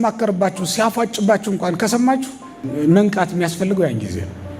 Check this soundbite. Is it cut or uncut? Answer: cut